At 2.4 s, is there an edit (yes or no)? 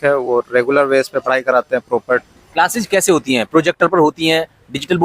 yes